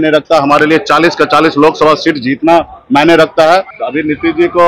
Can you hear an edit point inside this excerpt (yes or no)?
yes